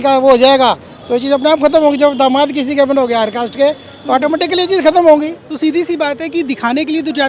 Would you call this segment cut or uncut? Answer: cut